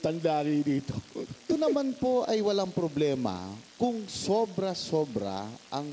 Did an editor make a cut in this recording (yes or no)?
yes